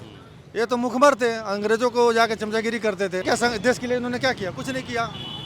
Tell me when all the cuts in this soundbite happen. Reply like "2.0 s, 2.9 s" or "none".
3.2 s